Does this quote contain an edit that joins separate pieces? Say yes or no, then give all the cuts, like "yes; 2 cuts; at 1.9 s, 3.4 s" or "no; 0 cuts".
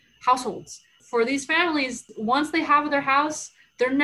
yes; 2 cuts; at 1.0 s, 2.0 s